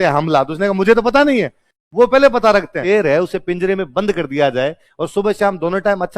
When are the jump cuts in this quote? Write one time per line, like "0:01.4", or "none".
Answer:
0:02.8